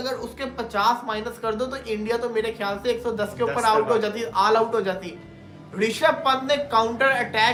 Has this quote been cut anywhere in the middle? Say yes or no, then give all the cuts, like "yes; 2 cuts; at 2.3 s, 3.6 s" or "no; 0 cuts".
no; 0 cuts